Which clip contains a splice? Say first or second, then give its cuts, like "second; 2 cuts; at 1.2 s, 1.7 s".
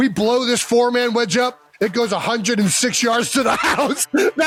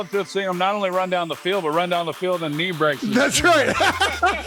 second; 1 cut; at 3.0 s